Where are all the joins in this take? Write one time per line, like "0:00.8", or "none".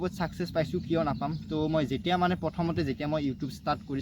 none